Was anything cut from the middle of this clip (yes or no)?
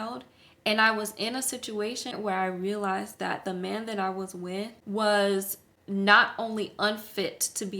yes